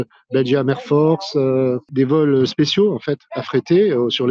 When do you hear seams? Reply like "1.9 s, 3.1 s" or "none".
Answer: 1.9 s